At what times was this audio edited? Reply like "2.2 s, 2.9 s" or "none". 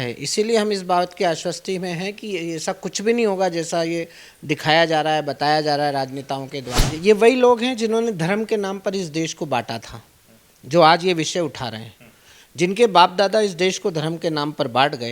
6.9 s